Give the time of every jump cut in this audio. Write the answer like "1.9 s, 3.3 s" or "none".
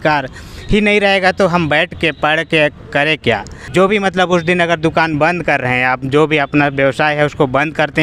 3.5 s